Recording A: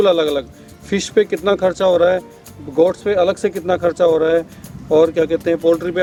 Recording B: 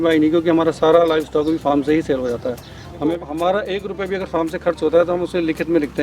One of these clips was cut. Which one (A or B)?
B